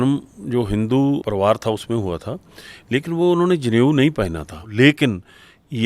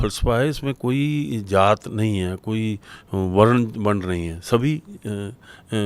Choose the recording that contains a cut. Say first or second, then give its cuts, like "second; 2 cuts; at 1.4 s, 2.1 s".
first; 2 cuts; at 1.2 s, 4.6 s